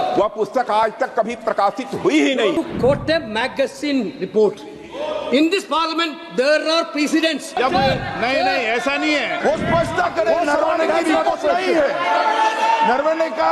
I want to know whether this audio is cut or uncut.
cut